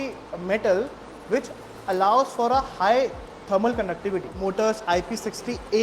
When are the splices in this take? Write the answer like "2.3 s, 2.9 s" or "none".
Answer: 4.3 s